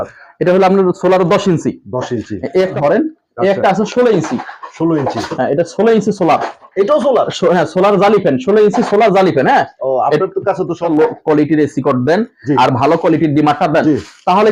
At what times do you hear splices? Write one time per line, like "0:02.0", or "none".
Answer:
0:02.7
0:10.8